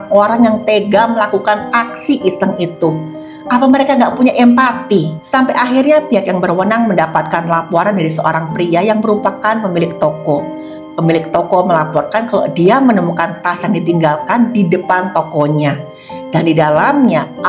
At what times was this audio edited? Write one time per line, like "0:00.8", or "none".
none